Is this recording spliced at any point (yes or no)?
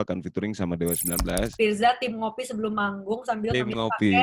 yes